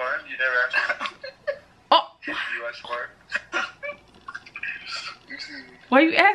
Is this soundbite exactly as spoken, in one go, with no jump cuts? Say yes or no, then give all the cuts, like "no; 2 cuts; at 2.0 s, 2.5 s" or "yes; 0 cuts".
yes; 0 cuts